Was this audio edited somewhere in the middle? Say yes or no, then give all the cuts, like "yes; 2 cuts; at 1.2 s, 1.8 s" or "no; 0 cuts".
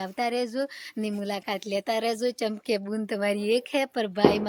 no; 0 cuts